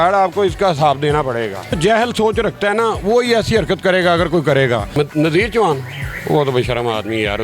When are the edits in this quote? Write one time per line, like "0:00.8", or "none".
0:01.8
0:04.9